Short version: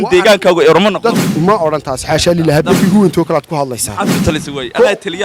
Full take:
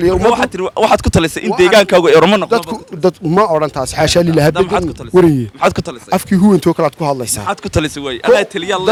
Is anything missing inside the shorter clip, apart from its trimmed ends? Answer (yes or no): yes